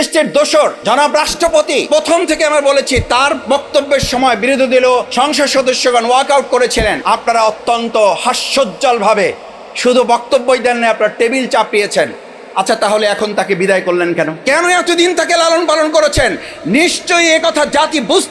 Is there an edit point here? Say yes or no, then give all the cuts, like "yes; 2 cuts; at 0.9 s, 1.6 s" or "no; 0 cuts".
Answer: yes; 5 cuts; at 0.8 s, 1.9 s, 5.1 s, 7.0 s, 14.4 s